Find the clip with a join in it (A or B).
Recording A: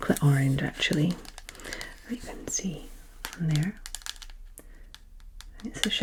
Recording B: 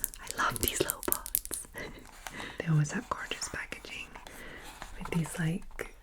B